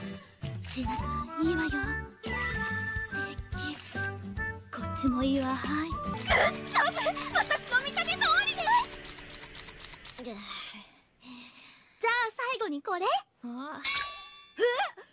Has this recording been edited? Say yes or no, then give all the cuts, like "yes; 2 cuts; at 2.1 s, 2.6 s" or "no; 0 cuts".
no; 0 cuts